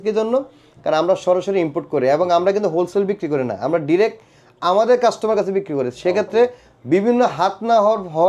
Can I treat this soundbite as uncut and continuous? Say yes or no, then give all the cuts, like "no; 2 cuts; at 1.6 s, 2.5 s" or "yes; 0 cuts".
yes; 0 cuts